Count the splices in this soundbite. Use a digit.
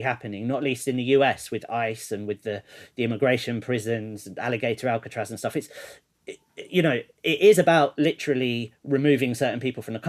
0